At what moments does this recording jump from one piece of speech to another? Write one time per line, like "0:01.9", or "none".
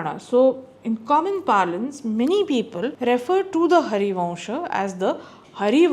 0:02.9